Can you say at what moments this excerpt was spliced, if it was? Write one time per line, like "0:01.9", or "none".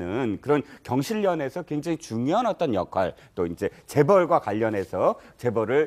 0:03.9